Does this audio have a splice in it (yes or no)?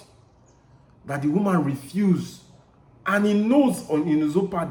no